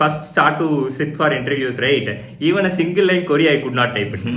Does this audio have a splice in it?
no; 0 cuts

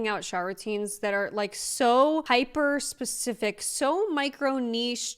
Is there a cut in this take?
yes; 1 cut; at 2.2 s

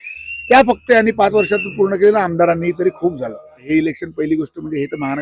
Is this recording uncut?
no; 1 cut; at 3.6 s

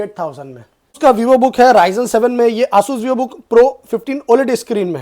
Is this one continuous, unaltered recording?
no; 1 cut; at 1.0 s

